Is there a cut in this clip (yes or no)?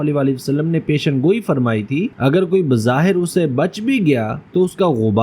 yes